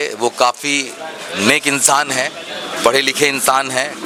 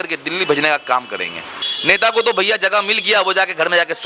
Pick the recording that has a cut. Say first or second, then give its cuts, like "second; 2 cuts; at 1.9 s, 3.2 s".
second; 1 cut; at 1.6 s